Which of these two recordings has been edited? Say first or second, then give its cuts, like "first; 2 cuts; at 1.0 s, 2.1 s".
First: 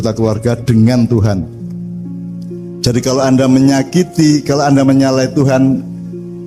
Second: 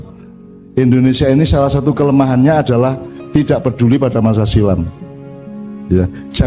first; 2 cuts; at 1.5 s, 2.8 s